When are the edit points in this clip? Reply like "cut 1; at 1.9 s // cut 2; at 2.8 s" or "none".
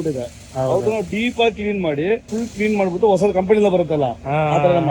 cut 1; at 2.3 s